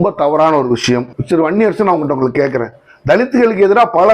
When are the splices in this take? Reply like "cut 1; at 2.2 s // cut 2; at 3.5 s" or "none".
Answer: cut 1; at 1.1 s